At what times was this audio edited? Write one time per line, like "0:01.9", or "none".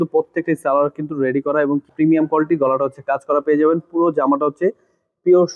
0:01.9